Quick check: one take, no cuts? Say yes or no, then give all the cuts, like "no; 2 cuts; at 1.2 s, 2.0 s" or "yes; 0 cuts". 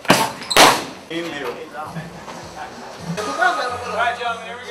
no; 1 cut; at 3.2 s